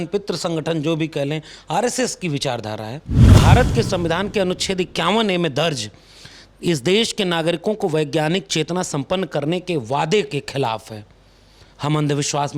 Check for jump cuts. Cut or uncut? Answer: cut